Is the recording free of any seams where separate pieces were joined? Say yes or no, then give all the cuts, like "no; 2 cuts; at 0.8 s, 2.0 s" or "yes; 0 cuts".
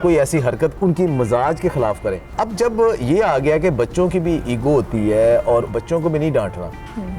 no; 3 cuts; at 0.7 s, 2.3 s, 5.7 s